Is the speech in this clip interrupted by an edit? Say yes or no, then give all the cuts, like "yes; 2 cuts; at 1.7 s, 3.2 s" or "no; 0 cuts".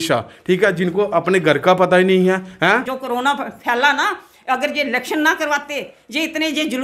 yes; 1 cut; at 2.9 s